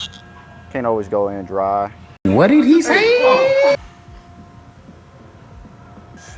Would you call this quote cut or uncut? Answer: uncut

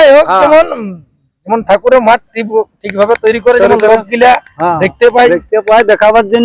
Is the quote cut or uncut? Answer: uncut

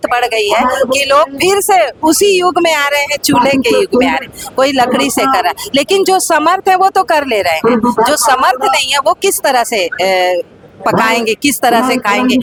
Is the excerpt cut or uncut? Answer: uncut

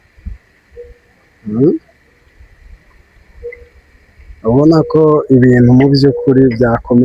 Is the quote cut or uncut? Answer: uncut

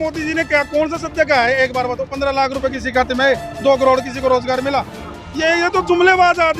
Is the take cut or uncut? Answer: uncut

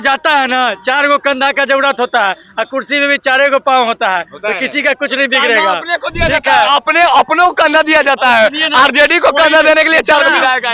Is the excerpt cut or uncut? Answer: uncut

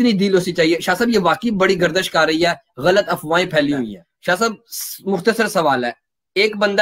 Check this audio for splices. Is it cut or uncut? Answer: cut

